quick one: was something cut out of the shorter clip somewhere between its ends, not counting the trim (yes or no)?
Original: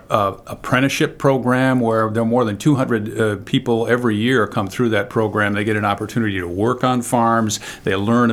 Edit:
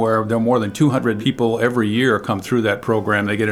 yes